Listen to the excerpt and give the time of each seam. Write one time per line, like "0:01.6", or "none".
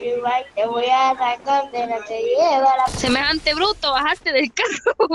0:02.9

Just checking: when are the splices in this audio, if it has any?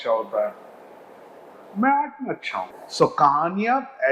0:02.7

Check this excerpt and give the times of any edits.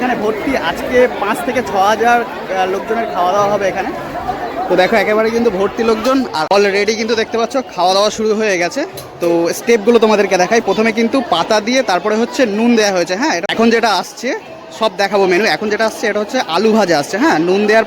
0:06.5
0:13.4

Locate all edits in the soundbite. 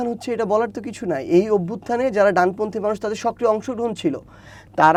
none

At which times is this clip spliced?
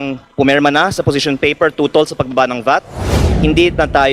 0:03.2

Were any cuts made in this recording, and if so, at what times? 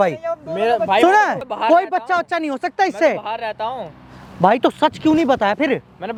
none

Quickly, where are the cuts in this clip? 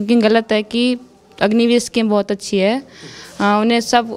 none

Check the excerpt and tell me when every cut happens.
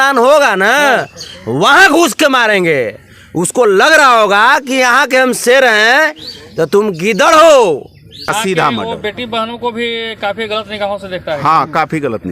0:08.3

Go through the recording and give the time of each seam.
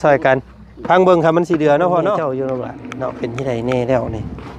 0:02.3

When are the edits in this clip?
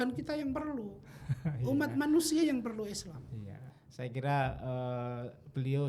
0:03.8

